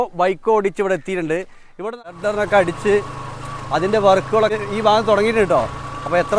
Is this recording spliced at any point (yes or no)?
yes